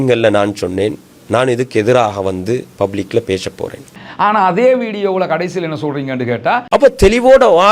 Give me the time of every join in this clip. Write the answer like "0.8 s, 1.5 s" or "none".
none